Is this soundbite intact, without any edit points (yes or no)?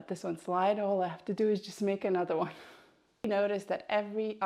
no